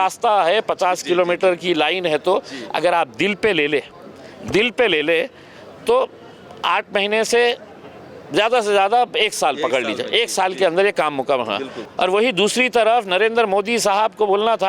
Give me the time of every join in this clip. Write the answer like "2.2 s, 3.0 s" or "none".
11.8 s